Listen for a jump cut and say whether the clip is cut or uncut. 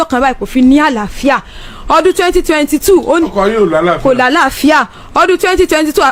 uncut